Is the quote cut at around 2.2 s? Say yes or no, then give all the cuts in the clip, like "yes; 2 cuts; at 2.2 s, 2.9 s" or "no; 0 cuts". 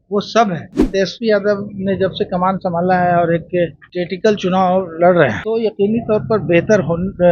no; 3 cuts; at 0.9 s, 3.8 s, 5.4 s